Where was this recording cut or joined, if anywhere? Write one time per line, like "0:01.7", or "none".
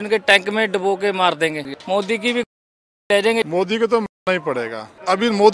0:01.6